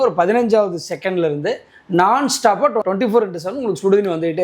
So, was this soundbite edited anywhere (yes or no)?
no